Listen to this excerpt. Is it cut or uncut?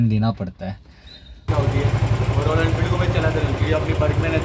cut